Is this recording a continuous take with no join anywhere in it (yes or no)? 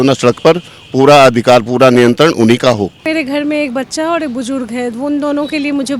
no